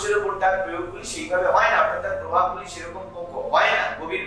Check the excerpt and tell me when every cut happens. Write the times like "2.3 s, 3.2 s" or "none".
none